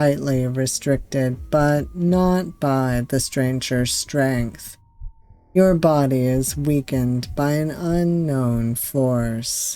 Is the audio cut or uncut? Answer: uncut